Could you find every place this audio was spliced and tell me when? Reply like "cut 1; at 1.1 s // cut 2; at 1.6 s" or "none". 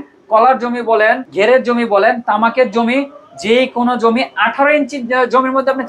cut 1; at 1.3 s